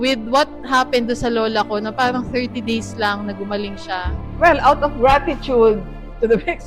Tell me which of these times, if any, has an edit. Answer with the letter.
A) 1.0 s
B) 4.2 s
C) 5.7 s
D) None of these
B